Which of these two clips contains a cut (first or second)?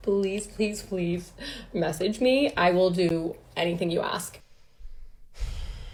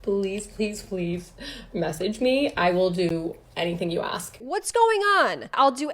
second